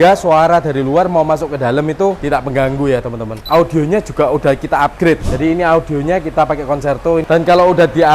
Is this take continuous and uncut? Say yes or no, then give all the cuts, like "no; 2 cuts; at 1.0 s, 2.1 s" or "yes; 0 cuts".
no; 3 cuts; at 2.2 s, 3.5 s, 7.2 s